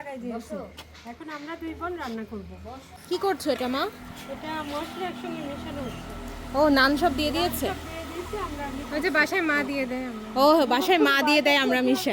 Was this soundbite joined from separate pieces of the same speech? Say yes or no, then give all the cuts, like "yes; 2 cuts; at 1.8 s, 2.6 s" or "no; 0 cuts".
yes; 1 cut; at 2.9 s